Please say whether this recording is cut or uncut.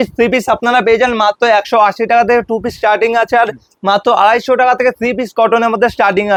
uncut